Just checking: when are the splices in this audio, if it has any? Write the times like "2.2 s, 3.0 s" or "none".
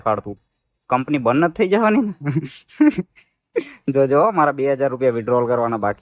none